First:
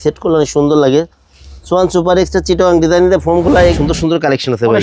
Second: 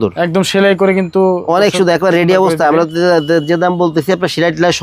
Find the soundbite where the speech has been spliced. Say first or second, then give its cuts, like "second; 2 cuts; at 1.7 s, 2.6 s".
first; 1 cut; at 3.8 s